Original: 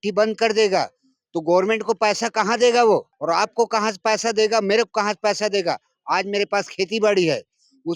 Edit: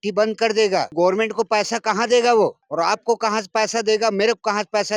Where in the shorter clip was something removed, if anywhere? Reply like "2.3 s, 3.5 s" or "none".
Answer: 0.9 s